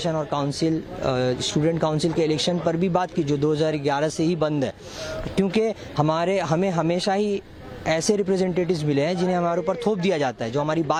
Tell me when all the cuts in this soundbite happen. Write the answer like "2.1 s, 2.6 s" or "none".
none